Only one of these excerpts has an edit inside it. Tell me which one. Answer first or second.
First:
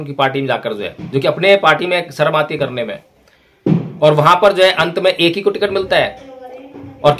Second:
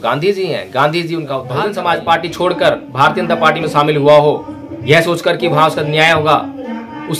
second